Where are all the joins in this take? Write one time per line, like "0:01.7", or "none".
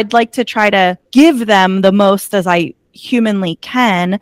0:01.0